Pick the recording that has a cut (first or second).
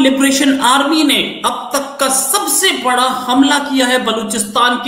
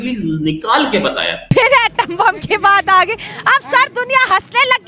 second